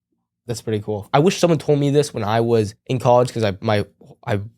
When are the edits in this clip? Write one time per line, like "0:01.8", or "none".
0:01.0
0:02.8